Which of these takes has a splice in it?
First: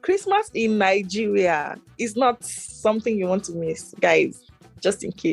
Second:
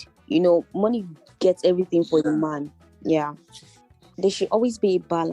second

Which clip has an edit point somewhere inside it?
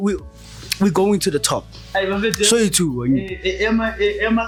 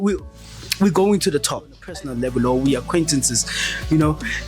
second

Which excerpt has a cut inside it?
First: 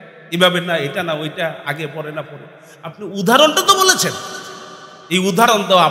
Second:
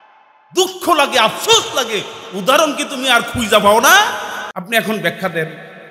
second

